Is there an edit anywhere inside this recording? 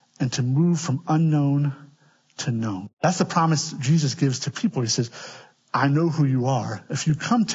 yes; 1 cut; at 2.9 s

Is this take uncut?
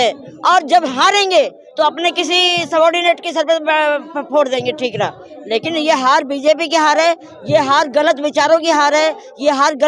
yes; 0 cuts

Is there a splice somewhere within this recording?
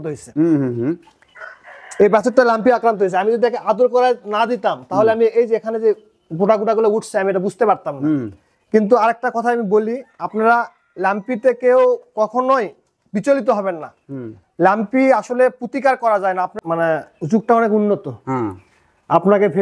yes; 1 cut; at 16.5 s

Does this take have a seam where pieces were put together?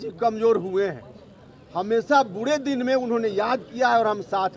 no; 0 cuts

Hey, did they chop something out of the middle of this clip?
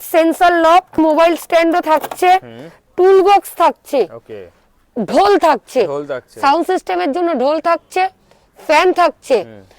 yes; 1 cut; at 1.0 s

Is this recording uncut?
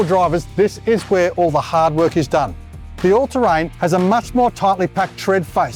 yes; 0 cuts

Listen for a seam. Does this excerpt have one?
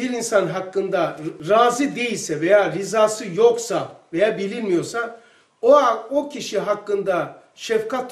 no; 0 cuts

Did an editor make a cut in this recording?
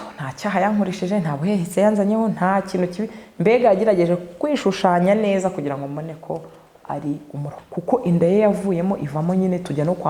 yes; 1 cut; at 7.6 s

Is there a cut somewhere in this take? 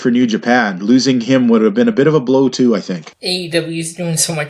yes; 1 cut; at 3.1 s

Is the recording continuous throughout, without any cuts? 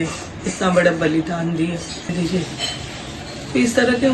no; 1 cut; at 2.1 s

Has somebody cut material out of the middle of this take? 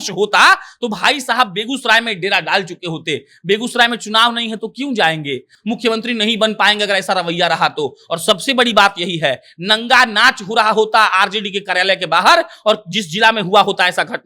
yes; 1 cut; at 5.5 s

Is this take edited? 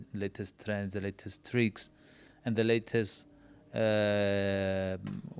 no; 0 cuts

